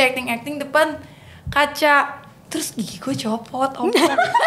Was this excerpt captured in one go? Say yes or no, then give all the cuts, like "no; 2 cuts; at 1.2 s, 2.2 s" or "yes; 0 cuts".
yes; 0 cuts